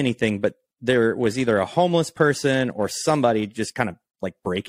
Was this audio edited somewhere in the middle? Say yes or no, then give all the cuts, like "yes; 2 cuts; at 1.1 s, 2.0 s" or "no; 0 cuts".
no; 0 cuts